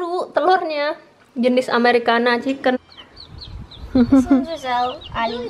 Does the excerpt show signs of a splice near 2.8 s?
yes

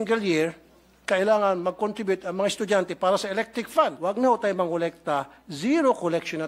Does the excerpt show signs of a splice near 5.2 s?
no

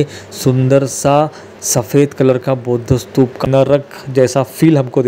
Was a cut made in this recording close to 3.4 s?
yes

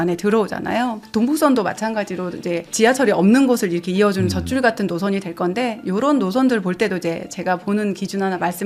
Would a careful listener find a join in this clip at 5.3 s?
no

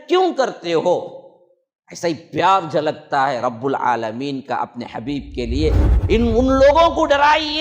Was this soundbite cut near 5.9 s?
yes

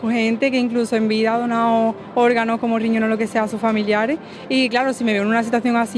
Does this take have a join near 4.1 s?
no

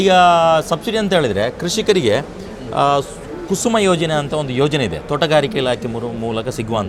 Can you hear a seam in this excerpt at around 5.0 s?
no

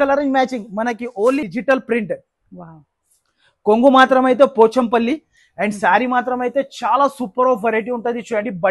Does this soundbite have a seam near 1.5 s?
yes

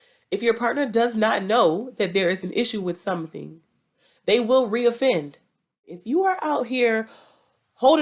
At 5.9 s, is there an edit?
yes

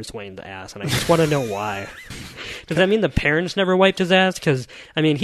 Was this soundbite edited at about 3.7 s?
no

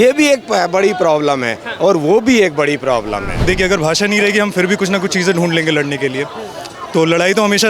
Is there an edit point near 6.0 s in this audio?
no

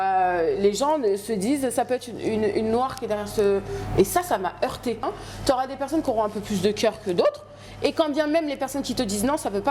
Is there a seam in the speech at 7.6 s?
no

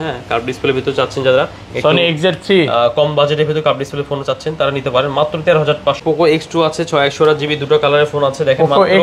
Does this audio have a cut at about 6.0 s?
yes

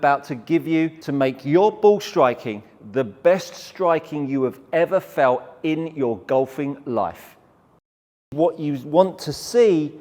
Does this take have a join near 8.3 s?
yes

